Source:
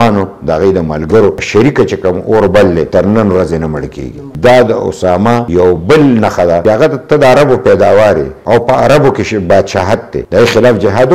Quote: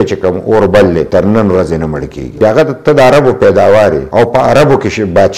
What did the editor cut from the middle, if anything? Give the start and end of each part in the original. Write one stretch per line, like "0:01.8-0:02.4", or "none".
0:04.2-0:06.6
0:08.3-0:08.4